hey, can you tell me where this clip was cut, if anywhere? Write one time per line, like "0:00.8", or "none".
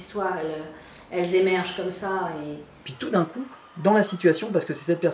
0:02.9